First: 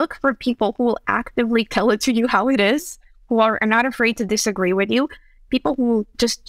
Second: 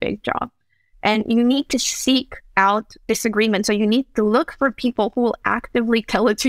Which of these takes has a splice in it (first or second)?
first